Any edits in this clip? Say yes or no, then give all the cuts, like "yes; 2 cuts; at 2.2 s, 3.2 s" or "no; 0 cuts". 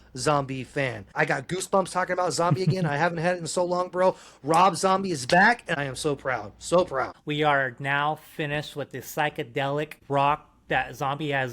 yes; 4 cuts; at 1.1 s, 5.8 s, 7.2 s, 10.0 s